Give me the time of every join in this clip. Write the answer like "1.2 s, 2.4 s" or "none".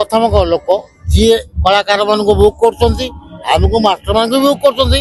none

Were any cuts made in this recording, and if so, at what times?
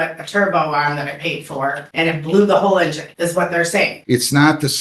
1.8 s, 3.0 s, 4.0 s

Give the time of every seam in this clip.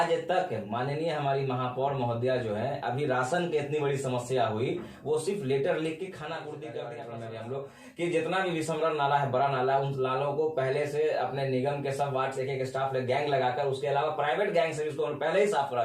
7.0 s

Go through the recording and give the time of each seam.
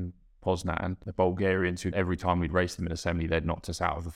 1.0 s, 1.9 s

